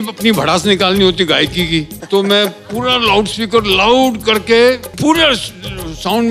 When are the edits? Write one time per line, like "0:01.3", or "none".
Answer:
0:02.0
0:04.9